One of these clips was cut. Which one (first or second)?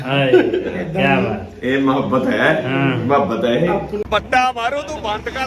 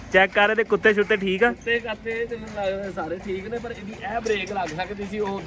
first